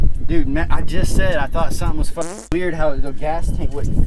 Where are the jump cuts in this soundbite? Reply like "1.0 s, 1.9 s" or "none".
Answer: none

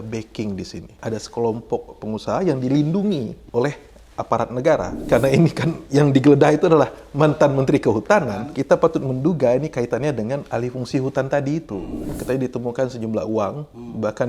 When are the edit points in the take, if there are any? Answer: 1.0 s, 2.0 s, 3.3 s, 5.0 s, 8.2 s, 11.9 s

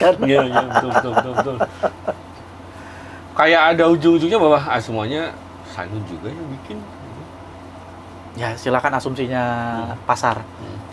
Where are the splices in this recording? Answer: none

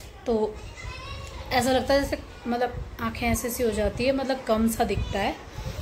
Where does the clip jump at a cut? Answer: none

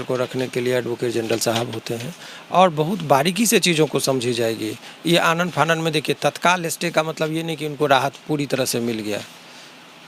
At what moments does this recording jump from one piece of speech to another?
none

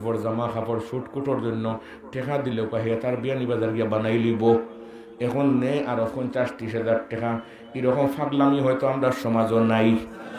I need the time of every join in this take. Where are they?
none

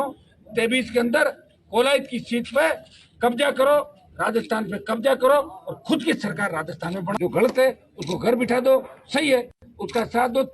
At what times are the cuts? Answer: 7.1 s

